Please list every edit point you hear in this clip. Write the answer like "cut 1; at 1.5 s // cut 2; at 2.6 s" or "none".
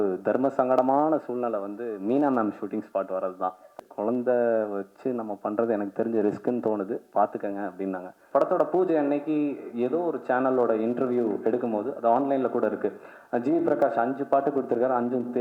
cut 1; at 3.8 s // cut 2; at 8.2 s